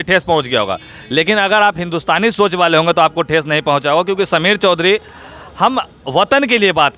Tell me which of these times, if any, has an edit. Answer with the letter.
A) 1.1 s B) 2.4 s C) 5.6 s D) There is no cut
D